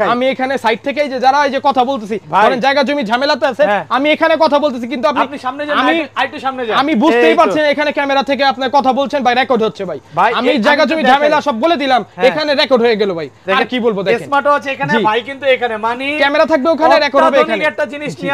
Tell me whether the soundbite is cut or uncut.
uncut